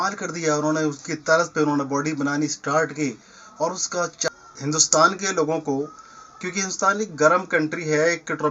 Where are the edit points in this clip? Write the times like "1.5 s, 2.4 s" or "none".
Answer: 4.3 s